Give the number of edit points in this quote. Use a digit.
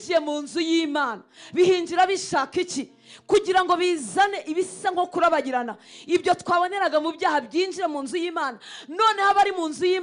0